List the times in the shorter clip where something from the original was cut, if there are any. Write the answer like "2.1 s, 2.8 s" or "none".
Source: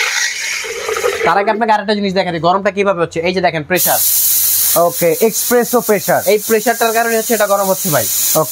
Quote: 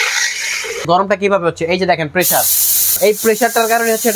0.8 s, 3.0 s